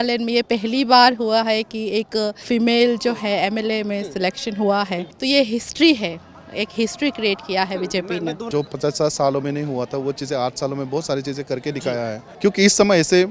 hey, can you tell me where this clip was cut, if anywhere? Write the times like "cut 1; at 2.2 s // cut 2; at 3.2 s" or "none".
cut 1; at 2.4 s // cut 2; at 5.1 s // cut 3; at 8.6 s // cut 4; at 12.2 s